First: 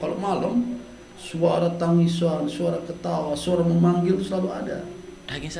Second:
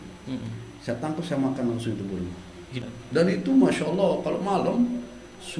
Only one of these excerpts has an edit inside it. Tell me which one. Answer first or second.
second